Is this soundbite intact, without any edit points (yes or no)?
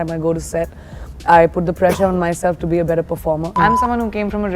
no